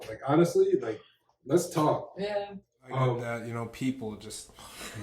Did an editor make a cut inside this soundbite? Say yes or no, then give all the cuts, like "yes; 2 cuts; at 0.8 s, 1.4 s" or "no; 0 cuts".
yes; 1 cut; at 3.2 s